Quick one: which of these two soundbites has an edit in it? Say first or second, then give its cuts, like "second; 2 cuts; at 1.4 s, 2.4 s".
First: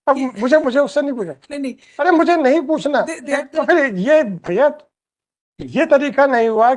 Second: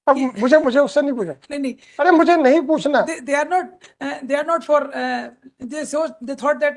first; 1 cut; at 3.4 s